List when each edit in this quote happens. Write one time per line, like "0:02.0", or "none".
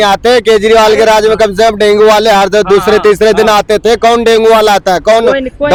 none

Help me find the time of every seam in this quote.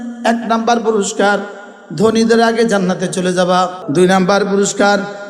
0:03.8

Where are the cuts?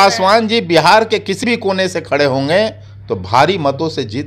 none

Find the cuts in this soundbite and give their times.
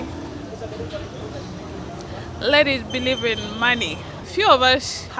0:04.3

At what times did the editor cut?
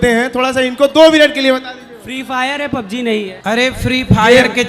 0:03.3

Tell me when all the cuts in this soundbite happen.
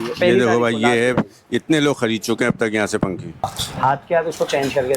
0:03.5

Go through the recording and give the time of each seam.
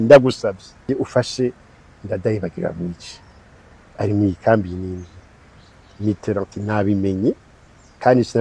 0:00.9

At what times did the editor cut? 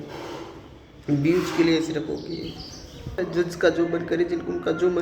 0:03.2

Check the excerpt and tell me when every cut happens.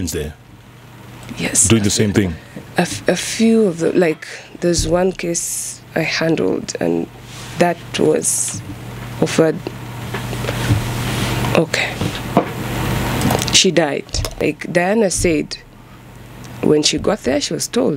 0:14.2

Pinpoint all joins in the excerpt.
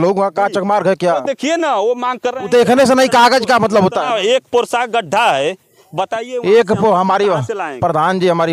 none

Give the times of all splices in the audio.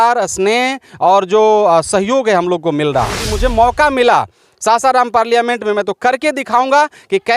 0:03.3

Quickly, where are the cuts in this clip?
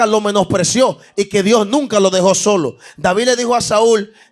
none

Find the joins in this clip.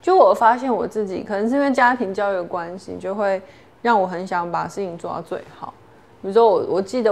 none

